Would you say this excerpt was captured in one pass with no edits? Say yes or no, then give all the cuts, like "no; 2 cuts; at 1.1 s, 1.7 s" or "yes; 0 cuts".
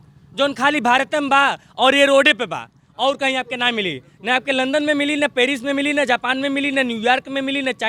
yes; 0 cuts